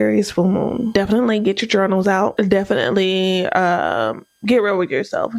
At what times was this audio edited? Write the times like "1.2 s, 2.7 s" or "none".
0.9 s, 2.3 s